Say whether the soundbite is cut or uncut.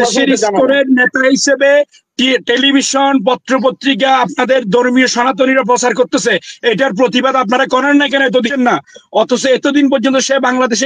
cut